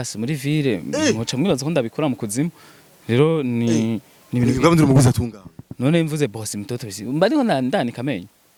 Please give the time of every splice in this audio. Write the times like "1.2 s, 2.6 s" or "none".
none